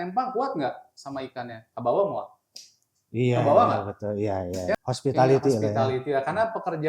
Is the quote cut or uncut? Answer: cut